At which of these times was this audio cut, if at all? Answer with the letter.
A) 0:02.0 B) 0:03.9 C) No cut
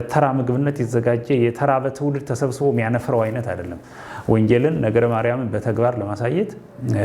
C